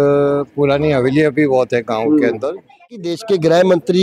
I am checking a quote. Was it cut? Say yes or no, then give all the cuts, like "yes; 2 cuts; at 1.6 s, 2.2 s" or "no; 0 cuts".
yes; 1 cut; at 3.1 s